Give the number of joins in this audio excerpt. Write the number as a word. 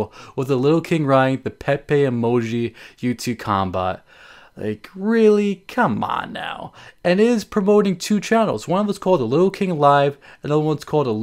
zero